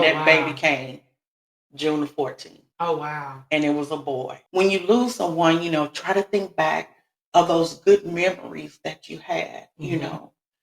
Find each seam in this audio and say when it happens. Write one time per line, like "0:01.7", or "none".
0:04.4